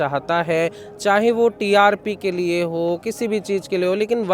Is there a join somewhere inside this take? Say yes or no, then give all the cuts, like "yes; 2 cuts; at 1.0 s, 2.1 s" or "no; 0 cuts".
no; 0 cuts